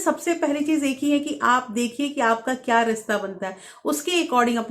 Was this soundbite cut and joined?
no; 0 cuts

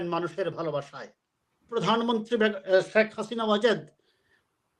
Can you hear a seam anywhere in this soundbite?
yes; 1 cut; at 1.7 s

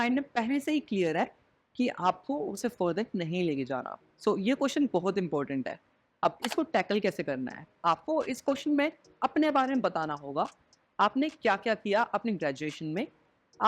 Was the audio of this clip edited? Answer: no; 0 cuts

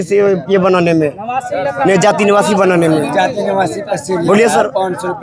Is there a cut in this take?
no; 0 cuts

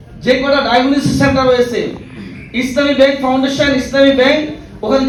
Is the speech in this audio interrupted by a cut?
no; 0 cuts

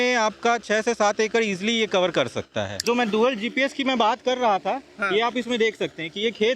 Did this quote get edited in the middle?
yes; 1 cut; at 2.8 s

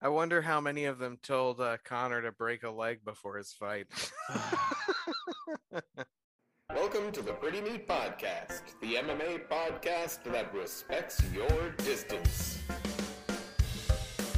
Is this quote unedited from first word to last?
no; 1 cut; at 5.8 s

